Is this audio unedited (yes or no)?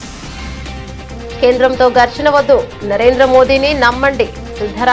no